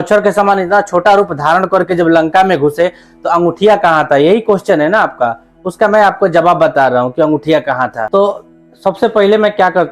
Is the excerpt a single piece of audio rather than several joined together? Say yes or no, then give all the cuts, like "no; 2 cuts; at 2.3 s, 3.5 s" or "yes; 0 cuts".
yes; 0 cuts